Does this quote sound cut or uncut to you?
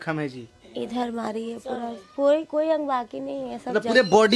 uncut